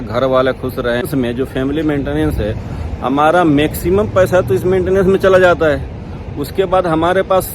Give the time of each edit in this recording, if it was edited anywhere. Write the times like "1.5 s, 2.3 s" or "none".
1.1 s